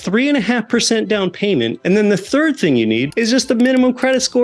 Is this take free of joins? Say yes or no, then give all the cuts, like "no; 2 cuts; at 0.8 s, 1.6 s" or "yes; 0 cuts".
no; 2 cuts; at 1.8 s, 3.1 s